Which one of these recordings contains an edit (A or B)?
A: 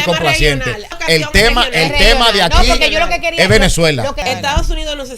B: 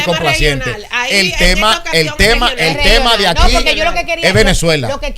A